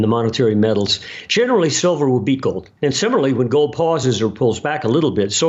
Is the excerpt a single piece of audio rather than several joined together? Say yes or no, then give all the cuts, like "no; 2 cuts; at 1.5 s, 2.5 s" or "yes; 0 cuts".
no; 1 cut; at 2.7 s